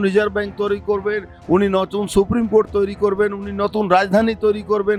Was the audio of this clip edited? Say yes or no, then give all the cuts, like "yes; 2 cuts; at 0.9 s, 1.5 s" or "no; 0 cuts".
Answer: no; 0 cuts